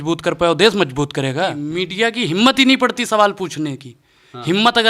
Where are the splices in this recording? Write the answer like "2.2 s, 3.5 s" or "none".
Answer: 1.6 s